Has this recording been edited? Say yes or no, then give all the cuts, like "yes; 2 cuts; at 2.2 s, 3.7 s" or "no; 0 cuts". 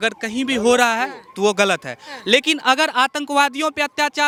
no; 0 cuts